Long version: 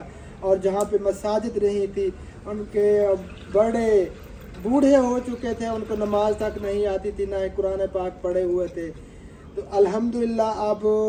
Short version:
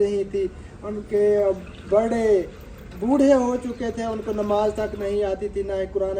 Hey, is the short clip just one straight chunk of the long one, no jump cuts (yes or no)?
yes